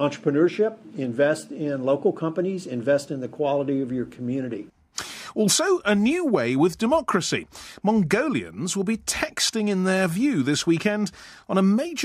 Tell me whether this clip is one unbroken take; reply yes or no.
no